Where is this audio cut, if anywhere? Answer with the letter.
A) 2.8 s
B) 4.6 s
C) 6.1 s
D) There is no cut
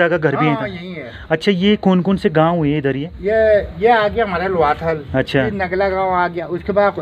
D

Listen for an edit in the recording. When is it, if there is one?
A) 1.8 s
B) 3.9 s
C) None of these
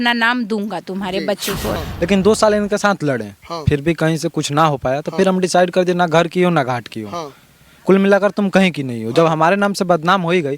A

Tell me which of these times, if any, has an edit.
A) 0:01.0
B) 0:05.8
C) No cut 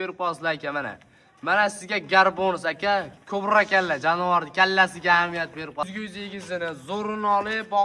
B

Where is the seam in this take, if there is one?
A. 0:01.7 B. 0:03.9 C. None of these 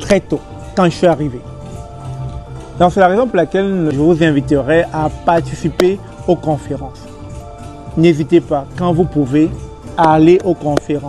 B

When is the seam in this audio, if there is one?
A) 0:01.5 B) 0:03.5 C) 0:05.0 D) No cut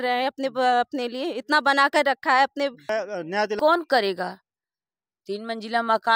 B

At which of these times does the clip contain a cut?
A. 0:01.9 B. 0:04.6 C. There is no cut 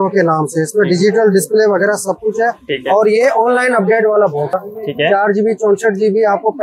B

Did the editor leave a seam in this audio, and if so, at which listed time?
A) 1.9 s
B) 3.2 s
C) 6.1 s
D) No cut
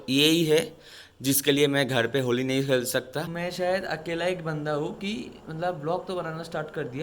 B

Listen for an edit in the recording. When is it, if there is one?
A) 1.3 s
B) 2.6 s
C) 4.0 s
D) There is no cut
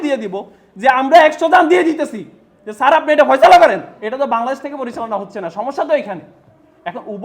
C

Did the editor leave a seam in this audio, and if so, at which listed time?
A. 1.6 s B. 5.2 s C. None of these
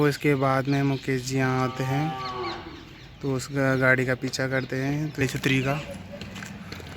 B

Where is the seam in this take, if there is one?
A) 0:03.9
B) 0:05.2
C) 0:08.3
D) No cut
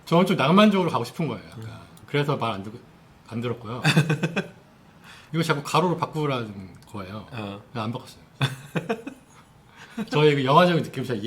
B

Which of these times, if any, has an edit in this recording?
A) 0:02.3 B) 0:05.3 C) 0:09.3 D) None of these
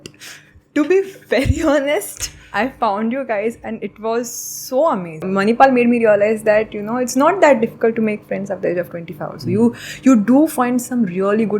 B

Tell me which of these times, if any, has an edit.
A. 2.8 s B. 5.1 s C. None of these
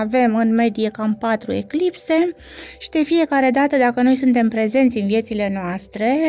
C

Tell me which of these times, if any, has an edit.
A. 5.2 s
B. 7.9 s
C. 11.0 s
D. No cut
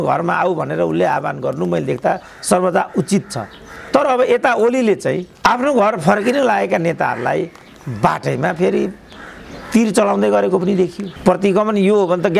C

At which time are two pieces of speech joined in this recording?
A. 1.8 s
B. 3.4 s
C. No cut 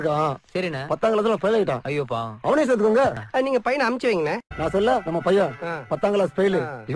A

